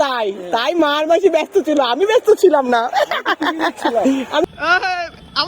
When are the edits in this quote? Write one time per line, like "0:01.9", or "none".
0:04.4